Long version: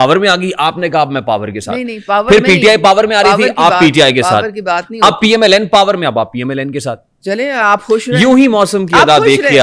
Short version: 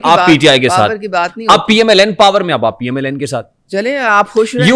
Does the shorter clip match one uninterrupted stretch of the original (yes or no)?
yes